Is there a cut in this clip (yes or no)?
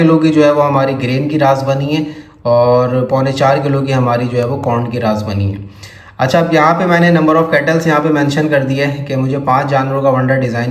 no